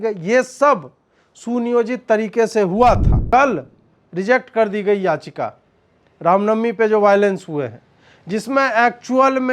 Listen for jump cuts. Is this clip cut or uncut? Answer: cut